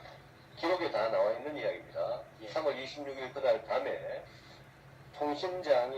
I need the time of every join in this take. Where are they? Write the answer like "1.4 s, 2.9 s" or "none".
none